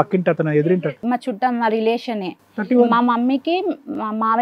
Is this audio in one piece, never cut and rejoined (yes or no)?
yes